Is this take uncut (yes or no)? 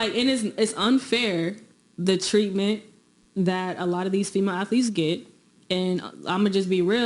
no